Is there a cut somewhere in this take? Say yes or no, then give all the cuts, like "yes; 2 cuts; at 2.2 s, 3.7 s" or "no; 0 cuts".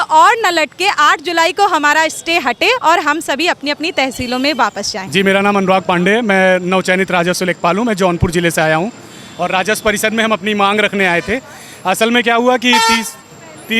no; 0 cuts